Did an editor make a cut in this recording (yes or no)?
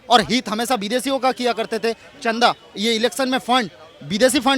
no